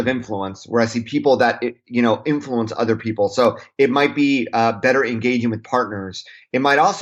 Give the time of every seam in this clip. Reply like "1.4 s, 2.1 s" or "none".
none